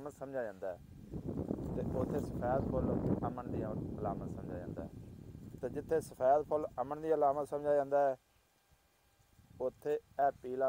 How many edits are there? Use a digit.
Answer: 0